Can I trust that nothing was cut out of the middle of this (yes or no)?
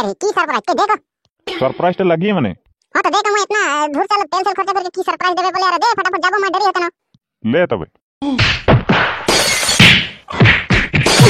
no